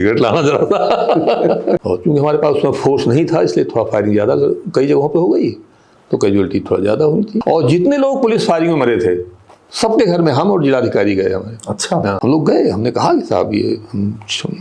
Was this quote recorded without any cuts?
no; 3 cuts; at 1.8 s, 7.4 s, 12.2 s

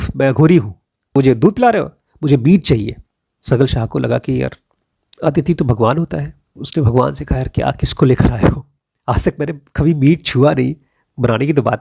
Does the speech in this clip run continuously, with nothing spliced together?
no; 1 cut; at 1.1 s

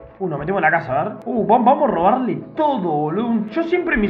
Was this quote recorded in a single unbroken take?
no; 1 cut; at 1.2 s

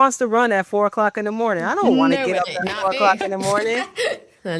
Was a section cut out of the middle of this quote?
no; 0 cuts

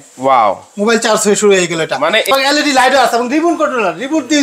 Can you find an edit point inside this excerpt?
yes; 1 cut; at 2.3 s

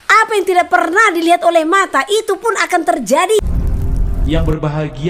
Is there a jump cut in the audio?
yes; 1 cut; at 3.4 s

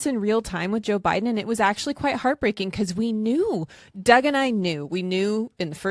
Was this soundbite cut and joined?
no; 0 cuts

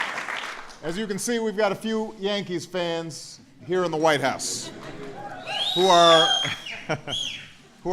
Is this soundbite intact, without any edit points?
no; 1 cut; at 4.6 s

